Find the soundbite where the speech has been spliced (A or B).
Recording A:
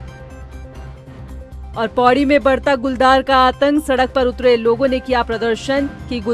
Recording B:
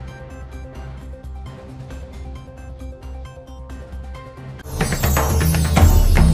A